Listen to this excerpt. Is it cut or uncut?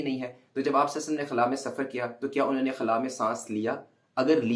uncut